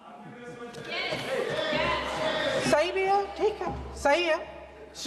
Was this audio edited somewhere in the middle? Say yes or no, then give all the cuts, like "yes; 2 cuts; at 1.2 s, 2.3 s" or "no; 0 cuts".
no; 0 cuts